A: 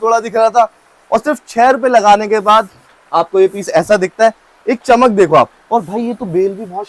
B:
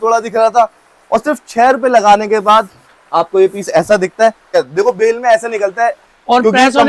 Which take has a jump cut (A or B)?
B